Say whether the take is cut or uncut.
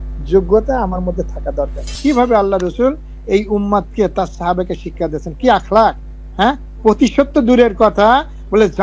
cut